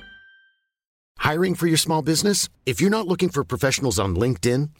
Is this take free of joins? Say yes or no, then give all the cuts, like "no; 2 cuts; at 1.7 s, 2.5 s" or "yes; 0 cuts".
no; 1 cut; at 1.1 s